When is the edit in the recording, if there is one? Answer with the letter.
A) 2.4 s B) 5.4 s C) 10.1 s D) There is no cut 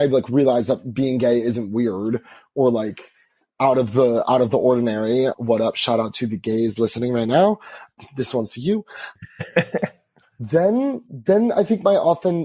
B